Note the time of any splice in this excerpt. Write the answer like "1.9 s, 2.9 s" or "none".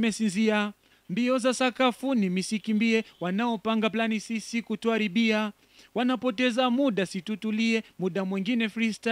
none